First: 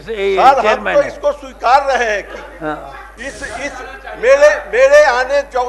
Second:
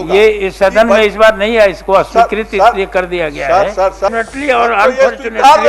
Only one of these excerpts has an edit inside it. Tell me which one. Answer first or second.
second